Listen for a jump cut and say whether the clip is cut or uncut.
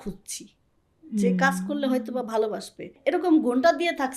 cut